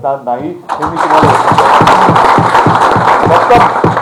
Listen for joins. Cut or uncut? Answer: uncut